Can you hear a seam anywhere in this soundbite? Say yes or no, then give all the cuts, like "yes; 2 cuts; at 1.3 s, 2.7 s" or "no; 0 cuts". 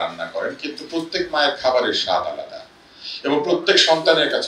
no; 0 cuts